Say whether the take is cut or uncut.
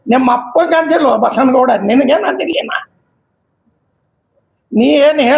uncut